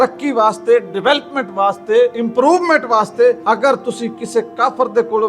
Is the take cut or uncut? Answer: cut